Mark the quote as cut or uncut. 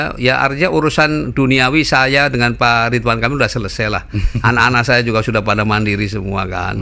uncut